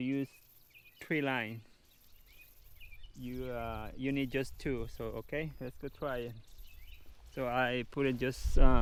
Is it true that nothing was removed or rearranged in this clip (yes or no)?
yes